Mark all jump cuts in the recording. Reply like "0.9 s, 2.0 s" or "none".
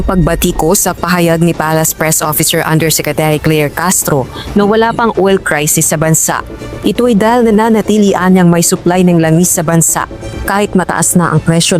none